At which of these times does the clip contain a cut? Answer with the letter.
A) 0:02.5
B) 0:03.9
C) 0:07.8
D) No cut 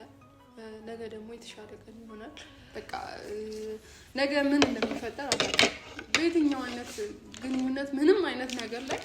A